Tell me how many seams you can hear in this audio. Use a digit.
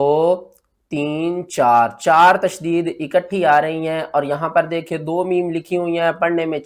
0